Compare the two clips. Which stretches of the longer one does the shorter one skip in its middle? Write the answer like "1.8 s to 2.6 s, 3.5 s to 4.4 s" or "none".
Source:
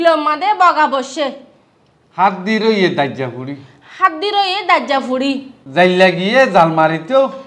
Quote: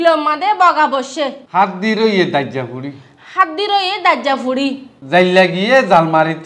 1.4 s to 2.0 s